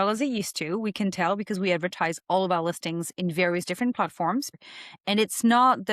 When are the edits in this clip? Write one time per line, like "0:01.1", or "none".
0:04.6